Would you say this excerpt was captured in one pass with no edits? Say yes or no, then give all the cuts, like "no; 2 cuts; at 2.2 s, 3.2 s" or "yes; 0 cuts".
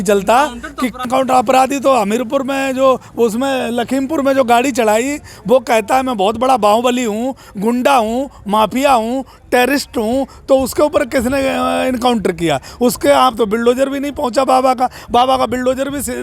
no; 1 cut; at 1.0 s